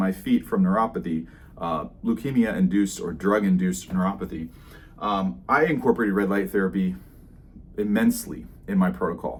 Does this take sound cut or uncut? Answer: uncut